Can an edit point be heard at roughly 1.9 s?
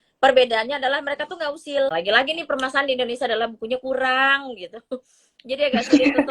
yes; 1 cut; at 1.9 s

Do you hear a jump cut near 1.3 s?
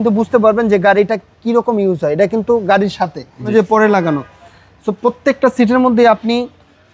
no; 1 cut; at 3.5 s

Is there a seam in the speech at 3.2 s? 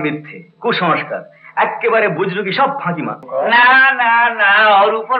yes; 1 cut; at 3.2 s

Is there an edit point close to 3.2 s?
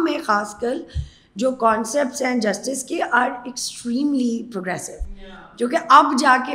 no; 0 cuts

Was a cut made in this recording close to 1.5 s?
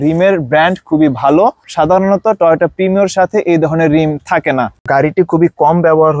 no; 1 cut; at 4.8 s

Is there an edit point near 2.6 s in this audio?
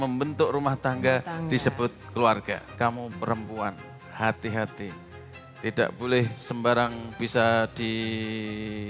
yes; 1 cut; at 2.6 s

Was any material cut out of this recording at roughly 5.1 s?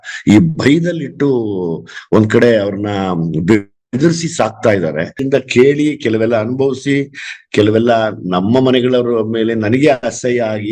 yes; 1 cut; at 5.1 s

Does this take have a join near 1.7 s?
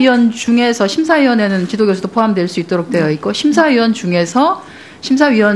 no; 1 cut; at 3.9 s

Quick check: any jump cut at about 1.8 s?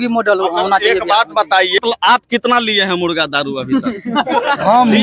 yes; 1 cut; at 1.8 s

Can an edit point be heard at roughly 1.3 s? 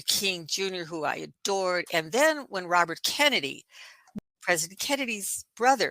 no; 1 cut; at 4.2 s

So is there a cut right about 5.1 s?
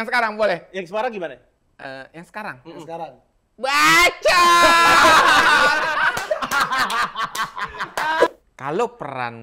no; 1 cut; at 8.3 s

